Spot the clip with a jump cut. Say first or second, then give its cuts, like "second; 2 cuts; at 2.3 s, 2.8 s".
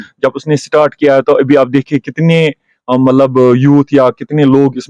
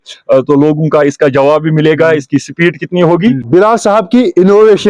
second; 1 cut; at 3.4 s